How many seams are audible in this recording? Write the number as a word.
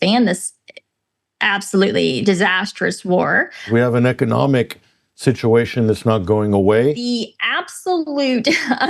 two